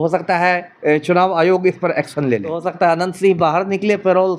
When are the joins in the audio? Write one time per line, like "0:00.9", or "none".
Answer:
0:02.7